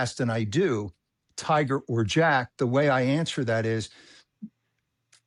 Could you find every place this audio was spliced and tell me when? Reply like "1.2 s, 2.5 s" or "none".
none